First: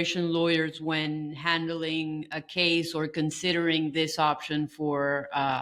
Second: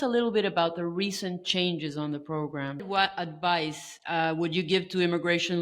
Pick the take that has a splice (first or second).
second